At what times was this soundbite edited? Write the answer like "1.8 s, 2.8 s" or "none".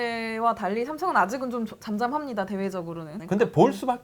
3.1 s